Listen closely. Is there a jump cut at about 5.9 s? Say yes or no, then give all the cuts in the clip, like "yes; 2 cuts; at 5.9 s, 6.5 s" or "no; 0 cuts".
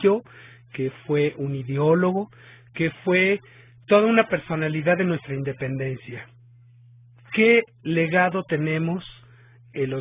no; 1 cut; at 7.5 s